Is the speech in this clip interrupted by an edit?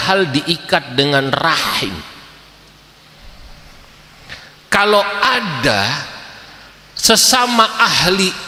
no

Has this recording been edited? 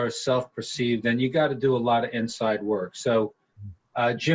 no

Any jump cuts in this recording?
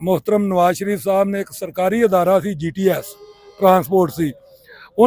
no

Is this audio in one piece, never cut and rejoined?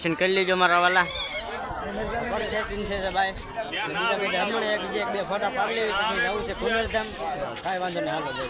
yes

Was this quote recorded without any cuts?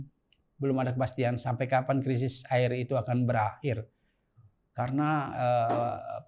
yes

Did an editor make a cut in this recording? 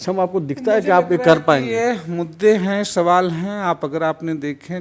no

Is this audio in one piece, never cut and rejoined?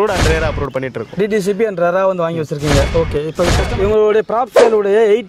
no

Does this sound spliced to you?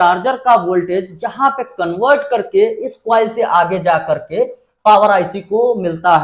no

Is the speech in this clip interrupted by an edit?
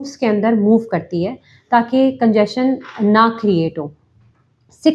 no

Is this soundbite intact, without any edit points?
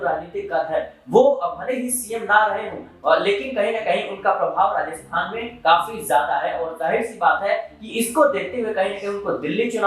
yes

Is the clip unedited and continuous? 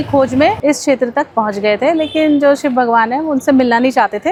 yes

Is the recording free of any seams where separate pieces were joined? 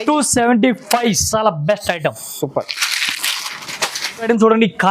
yes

